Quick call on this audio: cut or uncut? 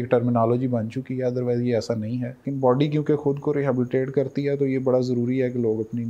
cut